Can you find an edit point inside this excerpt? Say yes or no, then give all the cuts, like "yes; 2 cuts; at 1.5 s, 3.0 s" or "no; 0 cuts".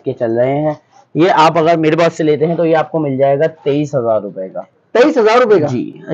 no; 0 cuts